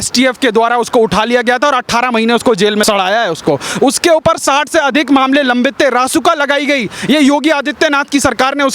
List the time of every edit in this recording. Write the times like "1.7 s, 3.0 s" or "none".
none